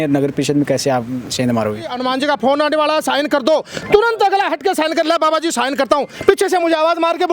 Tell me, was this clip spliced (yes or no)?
yes